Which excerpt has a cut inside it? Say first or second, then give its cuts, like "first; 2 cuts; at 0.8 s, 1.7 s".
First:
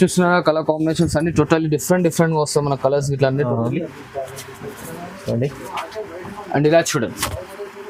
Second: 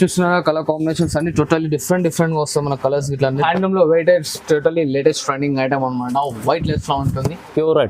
second; 1 cut; at 3.4 s